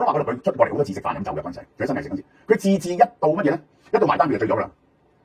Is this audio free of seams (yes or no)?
yes